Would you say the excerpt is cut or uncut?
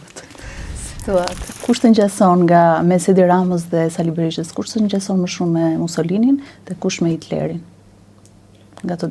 cut